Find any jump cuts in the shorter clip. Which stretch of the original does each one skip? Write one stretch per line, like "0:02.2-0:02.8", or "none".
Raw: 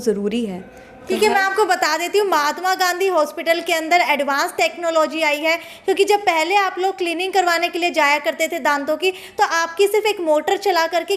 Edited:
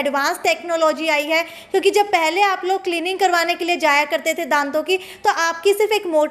none